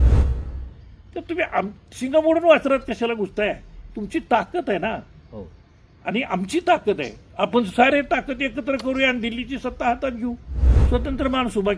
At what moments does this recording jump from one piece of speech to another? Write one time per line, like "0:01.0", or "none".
0:10.7